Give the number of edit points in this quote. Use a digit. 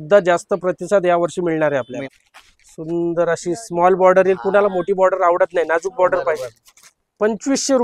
1